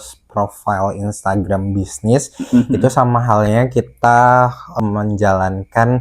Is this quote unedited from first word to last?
no; 1 cut; at 4.7 s

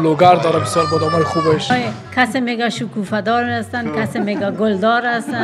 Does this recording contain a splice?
yes; 1 cut; at 1.7 s

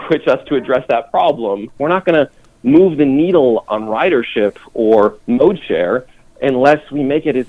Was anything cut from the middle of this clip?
yes; 2 cuts; at 1.8 s, 3.6 s

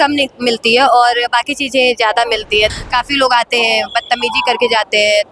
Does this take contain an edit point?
yes; 1 cut; at 2.7 s

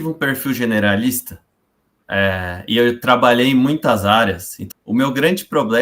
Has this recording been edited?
yes; 1 cut; at 4.7 s

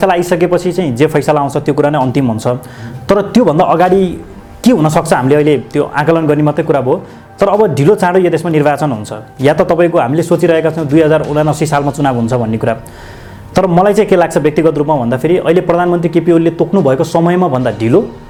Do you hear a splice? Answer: no; 0 cuts

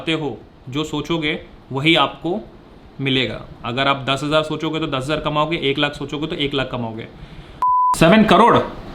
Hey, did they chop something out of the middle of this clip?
yes; 1 cut; at 7.7 s

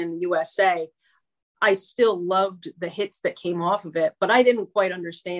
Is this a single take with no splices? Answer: yes; 0 cuts

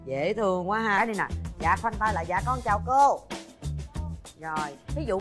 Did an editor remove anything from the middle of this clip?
yes; 1 cut; at 1.0 s

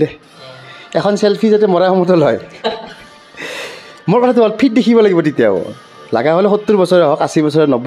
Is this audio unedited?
yes; 0 cuts

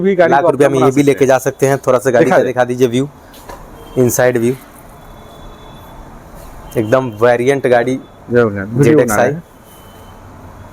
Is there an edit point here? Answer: no; 0 cuts

